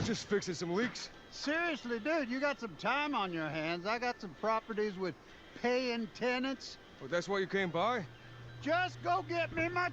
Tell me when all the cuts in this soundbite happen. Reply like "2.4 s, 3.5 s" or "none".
4.7 s, 7.7 s